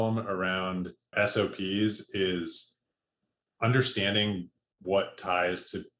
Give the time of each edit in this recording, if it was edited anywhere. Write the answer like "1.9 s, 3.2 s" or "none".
1.1 s